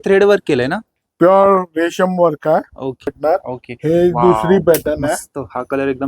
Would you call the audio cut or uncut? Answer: cut